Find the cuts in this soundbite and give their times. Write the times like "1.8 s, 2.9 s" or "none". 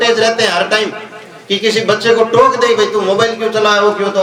none